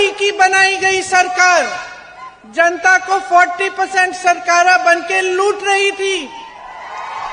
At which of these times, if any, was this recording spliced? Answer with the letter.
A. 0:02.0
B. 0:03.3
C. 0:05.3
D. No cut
D